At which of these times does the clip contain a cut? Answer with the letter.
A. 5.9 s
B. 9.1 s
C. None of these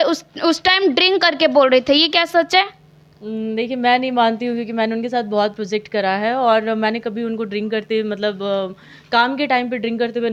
C